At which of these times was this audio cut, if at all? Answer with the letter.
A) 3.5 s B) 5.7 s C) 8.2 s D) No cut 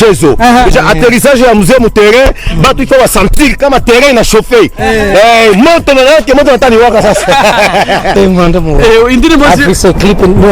C